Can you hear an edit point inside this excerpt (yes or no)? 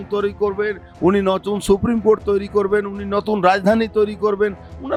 no